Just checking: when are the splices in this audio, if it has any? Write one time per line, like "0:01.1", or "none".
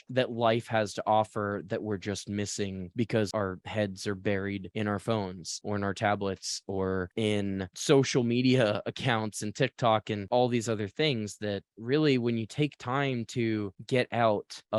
none